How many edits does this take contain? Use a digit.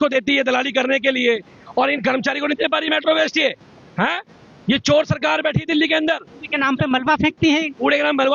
0